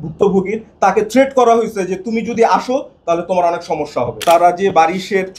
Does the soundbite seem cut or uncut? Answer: cut